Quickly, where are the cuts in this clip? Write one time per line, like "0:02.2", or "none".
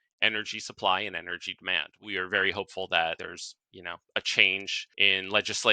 0:01.9
0:03.2
0:04.8